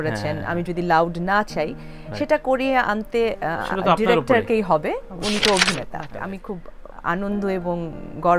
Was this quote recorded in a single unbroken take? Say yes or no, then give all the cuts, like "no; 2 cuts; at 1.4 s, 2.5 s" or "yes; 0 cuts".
no; 1 cut; at 6.1 s